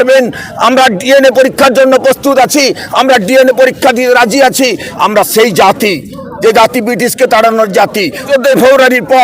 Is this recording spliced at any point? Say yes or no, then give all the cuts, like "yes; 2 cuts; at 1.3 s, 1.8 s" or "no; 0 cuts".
yes; 2 cuts; at 4.9 s, 8.2 s